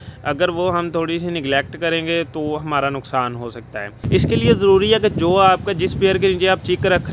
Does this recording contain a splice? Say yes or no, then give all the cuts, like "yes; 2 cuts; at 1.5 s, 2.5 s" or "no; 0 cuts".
yes; 1 cut; at 4.0 s